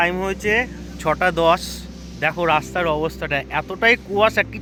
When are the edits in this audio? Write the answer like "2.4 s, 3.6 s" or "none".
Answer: none